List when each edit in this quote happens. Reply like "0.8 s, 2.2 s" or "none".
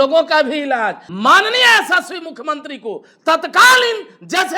1.1 s